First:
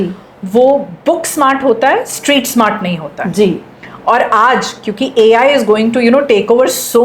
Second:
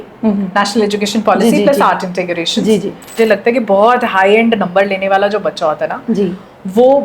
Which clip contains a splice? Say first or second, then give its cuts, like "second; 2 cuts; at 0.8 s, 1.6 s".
second; 1 cut; at 3.1 s